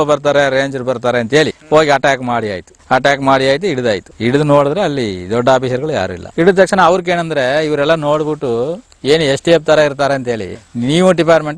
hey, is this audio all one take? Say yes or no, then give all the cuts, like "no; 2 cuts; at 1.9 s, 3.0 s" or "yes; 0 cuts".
no; 1 cut; at 6.2 s